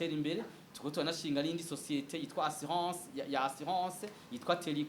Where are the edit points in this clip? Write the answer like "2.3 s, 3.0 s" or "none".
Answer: none